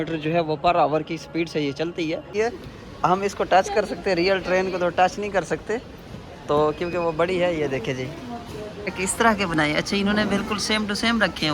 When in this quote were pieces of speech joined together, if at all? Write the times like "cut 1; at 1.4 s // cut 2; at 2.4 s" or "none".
cut 1; at 2.2 s // cut 2; at 9.0 s